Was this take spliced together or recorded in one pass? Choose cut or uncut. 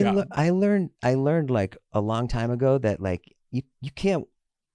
uncut